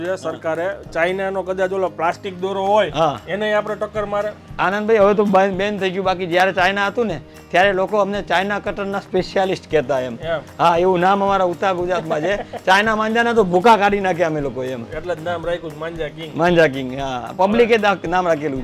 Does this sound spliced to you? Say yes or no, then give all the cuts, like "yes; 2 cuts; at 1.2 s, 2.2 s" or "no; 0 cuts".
no; 0 cuts